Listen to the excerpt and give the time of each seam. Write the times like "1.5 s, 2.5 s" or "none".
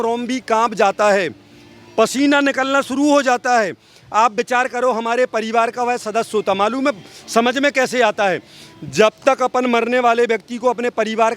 none